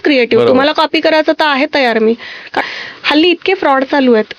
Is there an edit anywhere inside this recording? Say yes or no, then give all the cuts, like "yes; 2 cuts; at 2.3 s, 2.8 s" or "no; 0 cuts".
yes; 1 cut; at 2.6 s